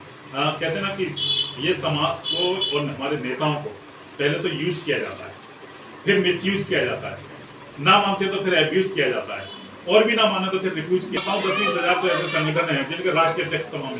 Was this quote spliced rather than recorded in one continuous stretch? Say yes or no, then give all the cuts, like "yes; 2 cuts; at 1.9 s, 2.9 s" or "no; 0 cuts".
yes; 1 cut; at 11.2 s